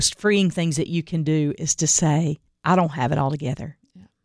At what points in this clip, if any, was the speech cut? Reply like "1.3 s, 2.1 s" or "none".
2.5 s